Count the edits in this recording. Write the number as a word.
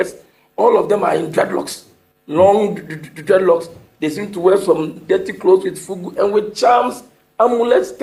zero